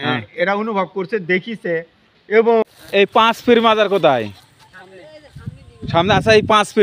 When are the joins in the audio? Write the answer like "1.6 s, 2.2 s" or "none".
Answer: 2.6 s

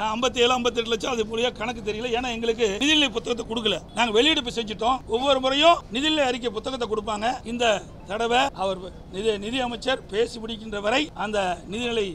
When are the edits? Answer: 2.8 s, 3.9 s, 5.0 s, 5.9 s, 7.5 s, 8.5 s, 11.1 s

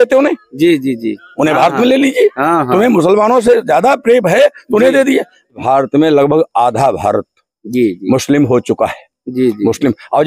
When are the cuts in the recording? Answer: 5.6 s

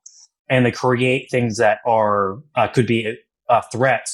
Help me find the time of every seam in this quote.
none

